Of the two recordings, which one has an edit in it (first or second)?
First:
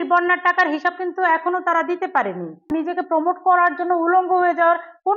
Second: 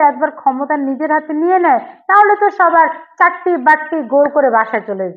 first